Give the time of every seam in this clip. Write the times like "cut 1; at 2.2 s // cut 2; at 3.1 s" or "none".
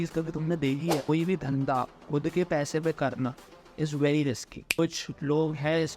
cut 1; at 1.1 s // cut 2; at 4.8 s